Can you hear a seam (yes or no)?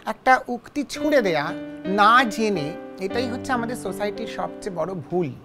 no